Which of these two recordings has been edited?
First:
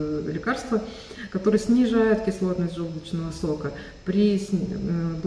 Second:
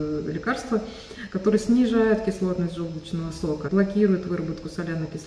second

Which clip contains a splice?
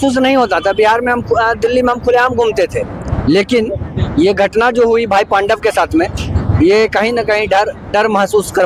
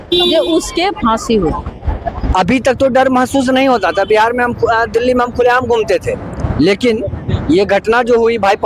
second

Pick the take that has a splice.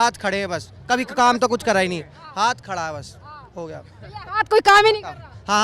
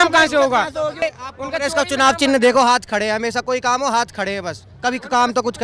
second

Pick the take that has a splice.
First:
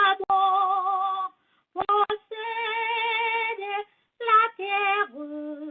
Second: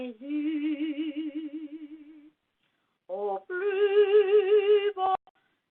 second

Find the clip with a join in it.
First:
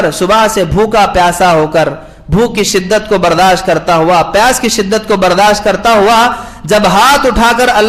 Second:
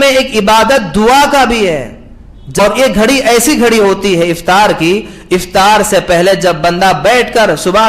second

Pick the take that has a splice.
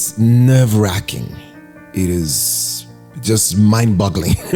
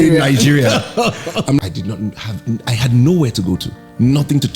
second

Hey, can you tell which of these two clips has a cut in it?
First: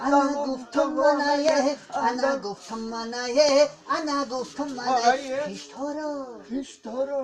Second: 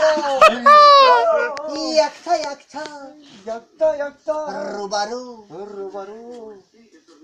second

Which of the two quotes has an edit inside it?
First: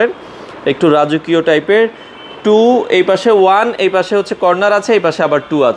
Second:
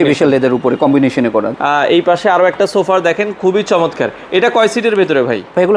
second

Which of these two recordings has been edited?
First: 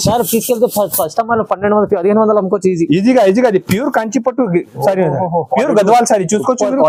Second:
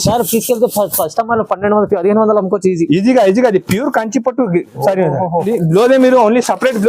second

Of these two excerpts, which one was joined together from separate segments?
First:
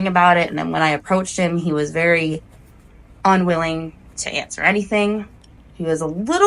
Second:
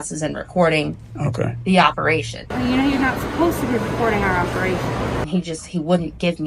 second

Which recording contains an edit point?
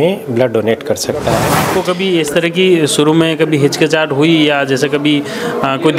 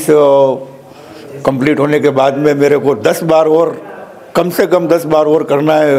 first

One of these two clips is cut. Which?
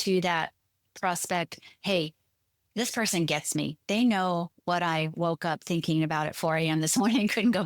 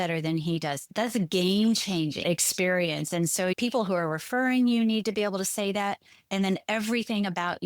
second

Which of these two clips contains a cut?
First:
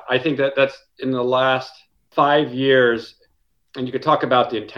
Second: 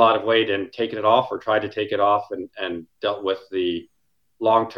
first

